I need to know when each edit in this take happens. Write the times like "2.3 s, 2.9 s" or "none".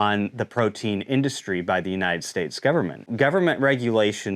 3.1 s